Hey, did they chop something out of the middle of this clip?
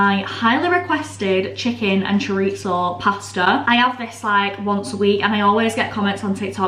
no; 0 cuts

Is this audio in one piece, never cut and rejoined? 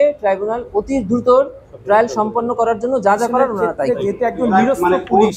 yes; 0 cuts

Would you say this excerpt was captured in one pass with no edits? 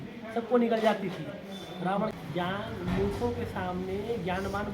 no; 1 cut; at 2.1 s

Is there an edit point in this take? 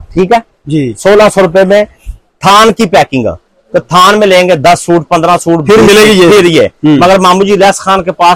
no; 0 cuts

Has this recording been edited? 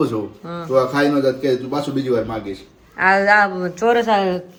no; 0 cuts

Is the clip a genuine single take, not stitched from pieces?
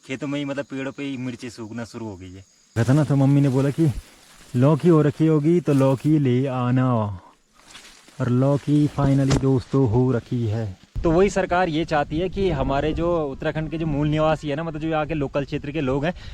no; 2 cuts; at 2.7 s, 10.8 s

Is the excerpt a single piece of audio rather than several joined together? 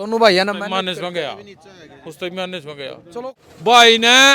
no; 1 cut; at 3.3 s

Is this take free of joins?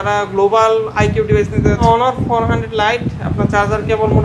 no; 1 cut; at 1.8 s

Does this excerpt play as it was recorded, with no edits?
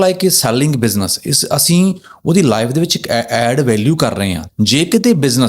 no; 1 cut; at 4.4 s

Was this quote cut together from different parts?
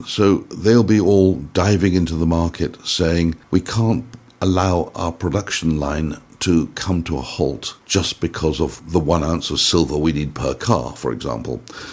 yes; 3 cuts; at 3.4 s, 7.7 s, 8.8 s

